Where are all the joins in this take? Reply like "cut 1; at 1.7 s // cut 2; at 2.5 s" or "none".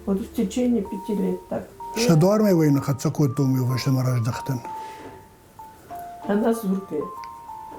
cut 1; at 1.8 s